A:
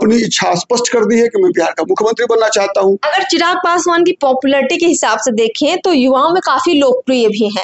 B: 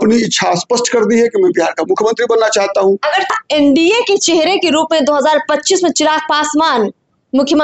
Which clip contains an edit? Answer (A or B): B